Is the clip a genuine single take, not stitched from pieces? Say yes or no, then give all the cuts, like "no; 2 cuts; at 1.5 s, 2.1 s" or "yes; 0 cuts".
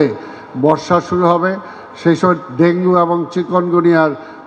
yes; 0 cuts